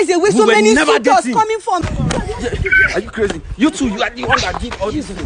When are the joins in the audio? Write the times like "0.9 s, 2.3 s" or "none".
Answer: 1.8 s